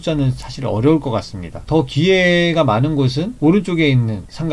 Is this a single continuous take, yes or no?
yes